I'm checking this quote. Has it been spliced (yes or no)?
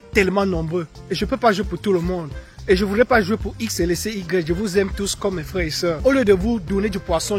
yes